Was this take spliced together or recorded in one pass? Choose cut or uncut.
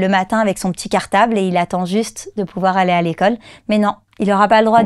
uncut